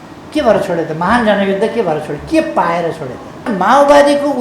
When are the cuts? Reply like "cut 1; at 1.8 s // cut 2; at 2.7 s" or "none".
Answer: cut 1; at 3.5 s